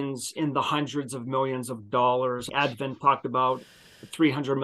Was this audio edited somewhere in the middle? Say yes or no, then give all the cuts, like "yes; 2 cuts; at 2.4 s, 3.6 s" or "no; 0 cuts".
yes; 1 cut; at 2.5 s